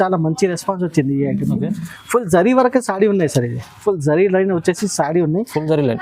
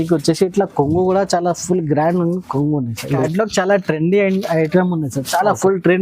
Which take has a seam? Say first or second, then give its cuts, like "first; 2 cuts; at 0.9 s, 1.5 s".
second; 1 cut; at 3.0 s